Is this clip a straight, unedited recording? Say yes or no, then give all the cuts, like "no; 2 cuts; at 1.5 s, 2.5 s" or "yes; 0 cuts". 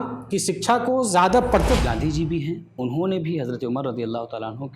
no; 1 cut; at 1.8 s